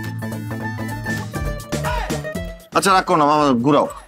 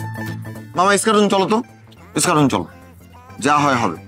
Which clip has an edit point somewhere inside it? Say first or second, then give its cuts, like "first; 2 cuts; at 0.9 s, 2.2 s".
first; 1 cut; at 1.3 s